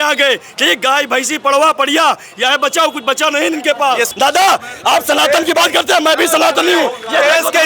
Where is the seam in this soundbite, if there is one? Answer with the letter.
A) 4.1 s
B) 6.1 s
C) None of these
A